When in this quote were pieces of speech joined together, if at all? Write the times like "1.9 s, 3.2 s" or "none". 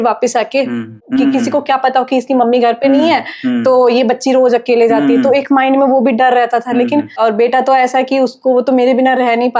1.0 s, 7.2 s

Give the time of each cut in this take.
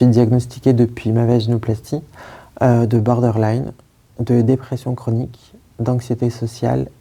none

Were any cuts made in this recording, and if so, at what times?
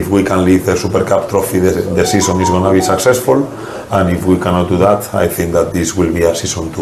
none

